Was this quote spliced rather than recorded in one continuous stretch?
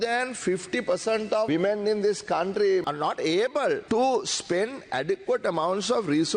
yes; 3 cuts; at 1.5 s, 2.8 s, 3.8 s

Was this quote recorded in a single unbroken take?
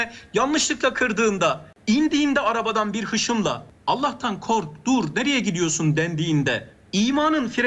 no; 3 cuts; at 1.7 s, 3.7 s, 6.7 s

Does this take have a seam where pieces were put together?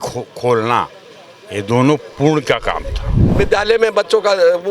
yes; 1 cut; at 3.4 s

